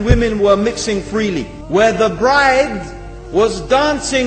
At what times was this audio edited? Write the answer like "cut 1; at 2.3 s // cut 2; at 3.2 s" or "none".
cut 1; at 1.5 s